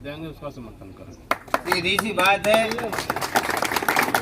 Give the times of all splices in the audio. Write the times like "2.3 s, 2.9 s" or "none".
1.6 s